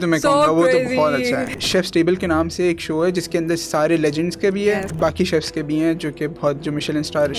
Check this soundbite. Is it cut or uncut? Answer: cut